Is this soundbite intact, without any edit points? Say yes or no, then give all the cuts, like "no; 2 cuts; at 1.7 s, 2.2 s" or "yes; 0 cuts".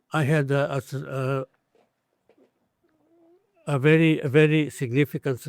yes; 0 cuts